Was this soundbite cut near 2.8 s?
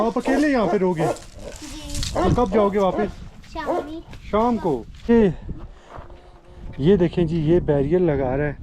no; 1 cut; at 5.1 s

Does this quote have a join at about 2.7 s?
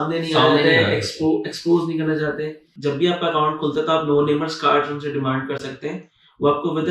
yes; 1 cut; at 2.7 s

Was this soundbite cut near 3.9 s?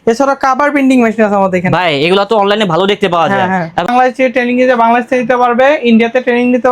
yes; 1 cut; at 3.9 s

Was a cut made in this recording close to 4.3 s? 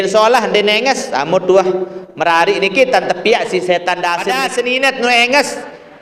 yes; 1 cut; at 4.3 s

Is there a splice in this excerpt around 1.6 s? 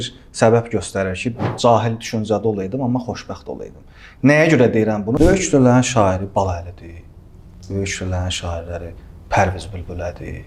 yes; 2 cuts; at 1.6 s, 5.1 s

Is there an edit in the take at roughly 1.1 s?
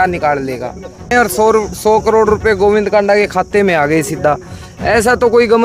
yes; 1 cut; at 1.1 s

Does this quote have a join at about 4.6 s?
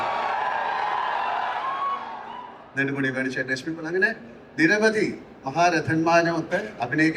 no; 0 cuts

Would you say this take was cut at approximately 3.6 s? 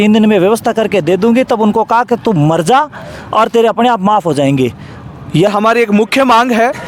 no; 1 cut; at 5.5 s

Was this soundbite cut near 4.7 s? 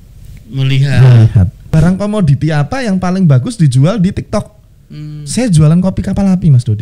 no; 1 cut; at 1.6 s

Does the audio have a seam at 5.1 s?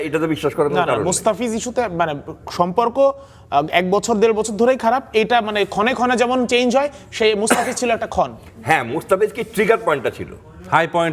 no; 0 cuts

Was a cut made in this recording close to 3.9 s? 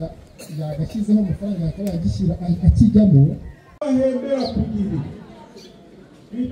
yes; 1 cut; at 3.9 s

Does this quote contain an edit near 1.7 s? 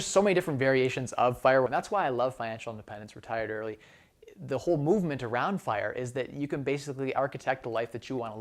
yes; 1 cut; at 1.7 s

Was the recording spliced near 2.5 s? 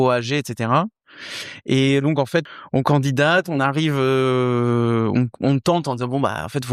yes; 1 cut; at 2.5 s

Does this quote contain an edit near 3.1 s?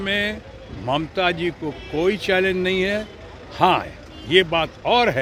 no; 0 cuts

